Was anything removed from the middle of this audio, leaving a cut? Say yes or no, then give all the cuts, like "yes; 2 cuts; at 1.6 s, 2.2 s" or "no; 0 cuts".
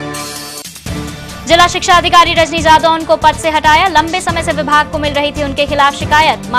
no; 0 cuts